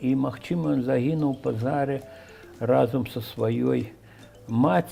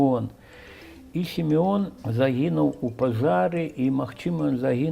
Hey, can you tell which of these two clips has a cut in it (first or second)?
second